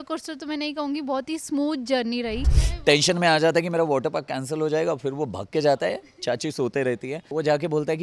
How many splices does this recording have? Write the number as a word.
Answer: two